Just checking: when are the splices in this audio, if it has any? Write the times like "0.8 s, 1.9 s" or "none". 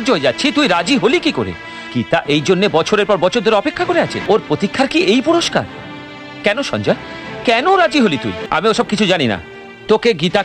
4.2 s, 8.4 s